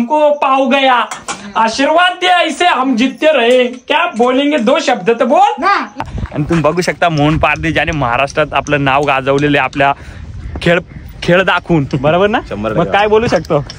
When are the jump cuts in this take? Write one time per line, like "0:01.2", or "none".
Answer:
0:06.0